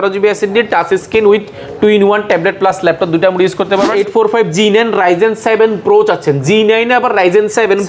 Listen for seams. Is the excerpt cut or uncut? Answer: cut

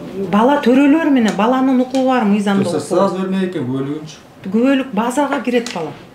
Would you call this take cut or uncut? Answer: uncut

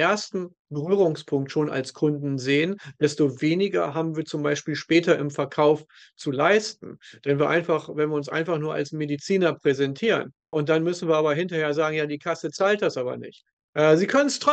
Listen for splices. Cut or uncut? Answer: uncut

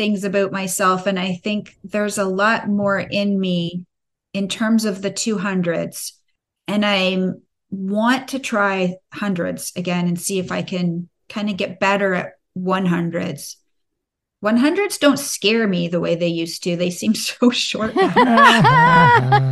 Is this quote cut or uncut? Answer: cut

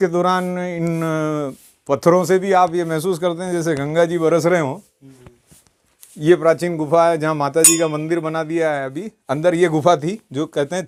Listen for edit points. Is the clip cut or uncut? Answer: uncut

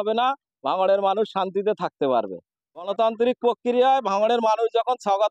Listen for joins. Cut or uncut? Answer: cut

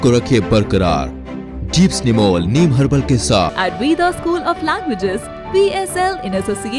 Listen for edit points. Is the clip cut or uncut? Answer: cut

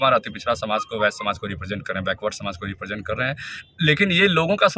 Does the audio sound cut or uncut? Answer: uncut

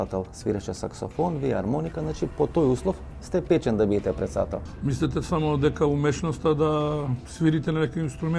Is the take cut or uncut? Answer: cut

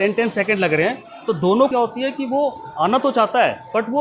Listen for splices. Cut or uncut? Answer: cut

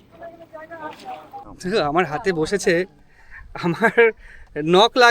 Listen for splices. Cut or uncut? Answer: cut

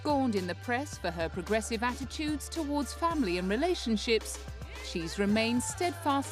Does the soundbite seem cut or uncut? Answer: cut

